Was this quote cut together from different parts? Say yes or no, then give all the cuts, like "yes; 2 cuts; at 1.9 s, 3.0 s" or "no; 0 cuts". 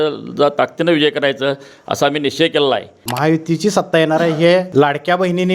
yes; 2 cuts; at 3.0 s, 4.7 s